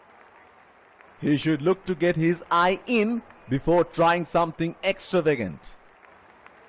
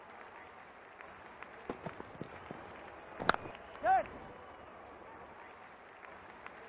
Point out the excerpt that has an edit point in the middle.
first; 2 cuts; at 1.2 s, 5.7 s

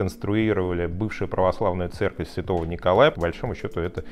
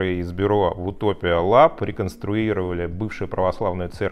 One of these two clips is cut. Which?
first; 1 cut; at 3.1 s

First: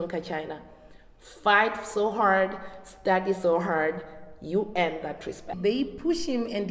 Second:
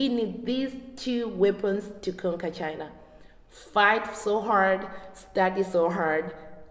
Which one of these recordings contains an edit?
first; 1 cut; at 5.6 s

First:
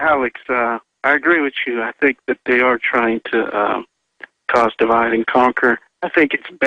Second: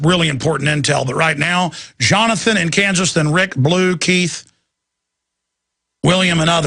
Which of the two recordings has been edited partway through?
second; 1 cut; at 1.3 s

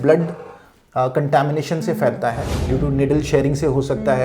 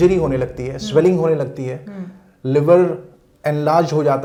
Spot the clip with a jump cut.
first; 1 cut; at 2.5 s

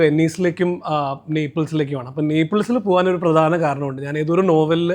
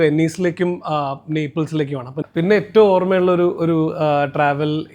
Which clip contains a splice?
second; 1 cut; at 2.1 s

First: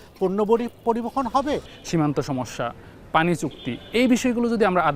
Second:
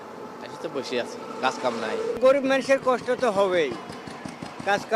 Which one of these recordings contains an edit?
first; 1 cut; at 1.7 s

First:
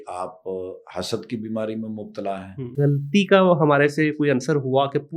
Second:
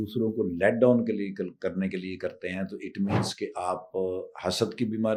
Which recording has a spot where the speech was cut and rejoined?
first; 1 cut; at 2.6 s

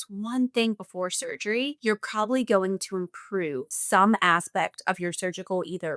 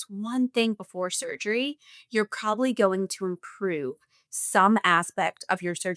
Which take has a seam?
first; 2 cuts; at 1.8 s, 3.7 s

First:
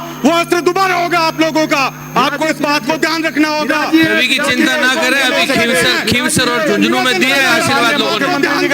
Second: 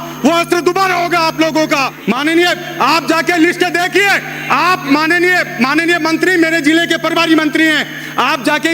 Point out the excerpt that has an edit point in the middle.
second; 1 cut; at 1.9 s

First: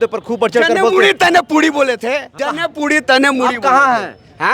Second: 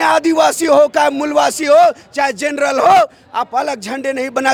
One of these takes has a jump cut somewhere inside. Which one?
first; 1 cut; at 2.4 s

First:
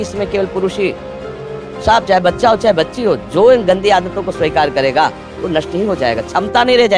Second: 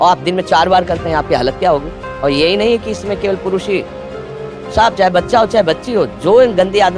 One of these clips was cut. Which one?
second; 1 cut; at 2.0 s

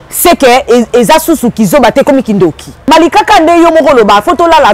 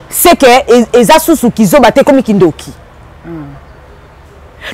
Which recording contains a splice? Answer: first; 1 cut; at 2.7 s

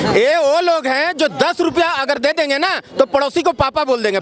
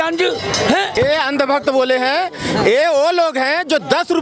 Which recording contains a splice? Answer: second; 1 cut; at 0.9 s

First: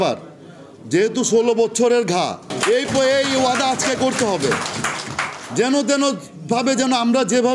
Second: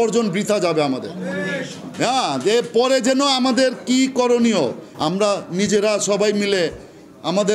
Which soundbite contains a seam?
first; 1 cut; at 2.5 s

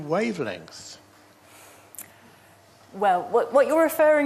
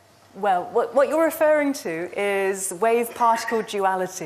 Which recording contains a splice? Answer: second; 1 cut; at 3.2 s

